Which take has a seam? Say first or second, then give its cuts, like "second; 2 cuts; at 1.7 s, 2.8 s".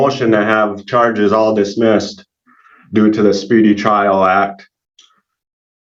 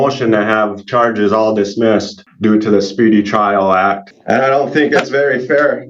second; 2 cuts; at 2.2 s, 4.1 s